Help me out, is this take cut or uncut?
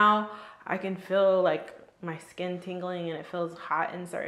uncut